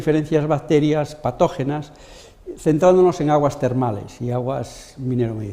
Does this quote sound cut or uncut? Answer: cut